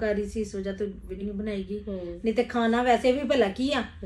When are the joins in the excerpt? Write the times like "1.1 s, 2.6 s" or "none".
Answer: 1.2 s

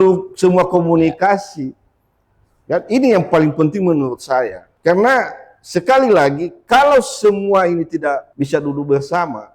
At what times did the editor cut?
4.6 s, 8.3 s

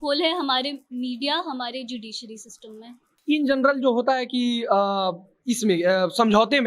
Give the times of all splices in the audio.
3.1 s

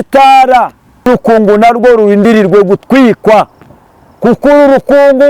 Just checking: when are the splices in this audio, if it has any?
1.1 s

